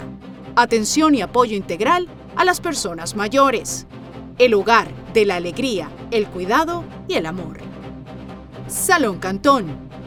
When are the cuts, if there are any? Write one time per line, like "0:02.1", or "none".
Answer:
none